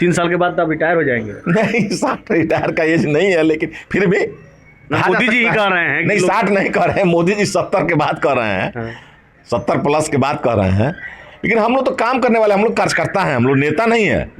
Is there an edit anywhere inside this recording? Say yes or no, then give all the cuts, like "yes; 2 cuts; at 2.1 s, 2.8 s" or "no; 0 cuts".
no; 0 cuts